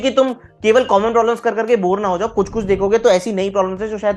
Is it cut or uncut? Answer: uncut